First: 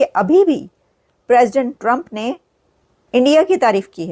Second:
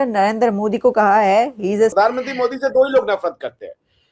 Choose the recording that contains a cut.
second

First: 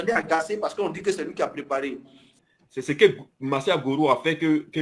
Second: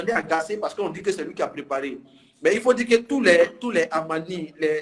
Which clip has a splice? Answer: first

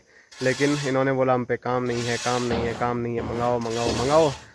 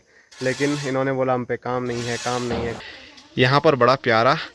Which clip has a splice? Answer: second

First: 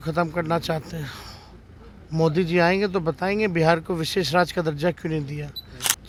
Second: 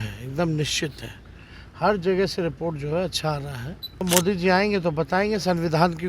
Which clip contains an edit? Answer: second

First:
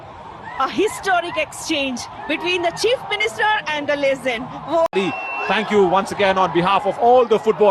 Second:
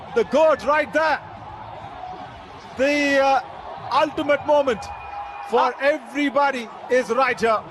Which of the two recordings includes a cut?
first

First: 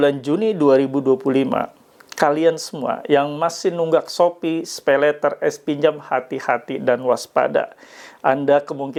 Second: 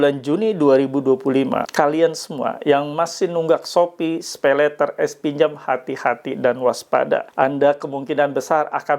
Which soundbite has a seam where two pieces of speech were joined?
second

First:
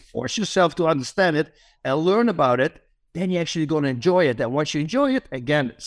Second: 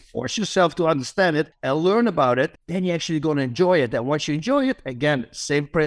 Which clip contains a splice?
second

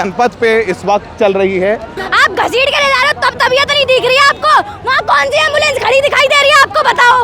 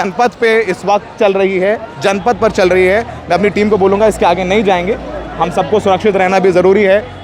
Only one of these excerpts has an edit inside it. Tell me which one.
first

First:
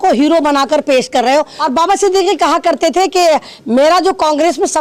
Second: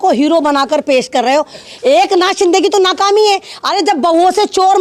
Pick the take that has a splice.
second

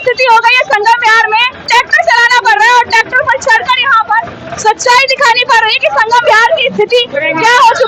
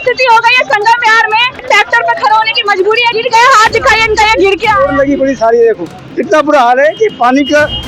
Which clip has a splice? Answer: second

